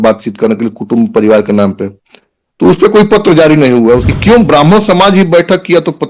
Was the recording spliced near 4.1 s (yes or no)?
yes